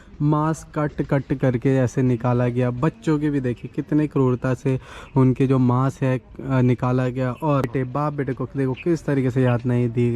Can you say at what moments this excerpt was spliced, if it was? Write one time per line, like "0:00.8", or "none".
0:07.7